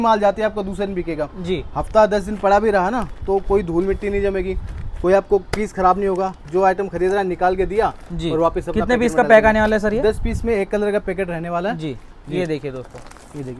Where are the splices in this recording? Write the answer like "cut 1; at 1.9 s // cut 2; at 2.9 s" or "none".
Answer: none